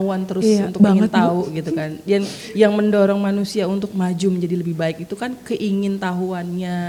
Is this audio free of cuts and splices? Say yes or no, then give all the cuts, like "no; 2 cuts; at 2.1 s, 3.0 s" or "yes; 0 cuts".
yes; 0 cuts